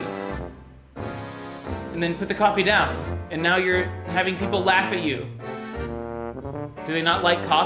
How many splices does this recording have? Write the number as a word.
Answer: zero